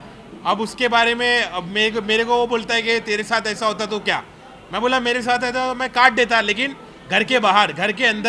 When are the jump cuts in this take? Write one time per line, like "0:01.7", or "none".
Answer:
none